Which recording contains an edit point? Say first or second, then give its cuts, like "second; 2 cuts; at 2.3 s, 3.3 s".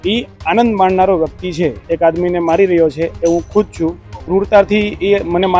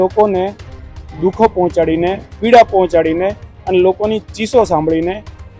first; 2 cuts; at 1.8 s, 4.1 s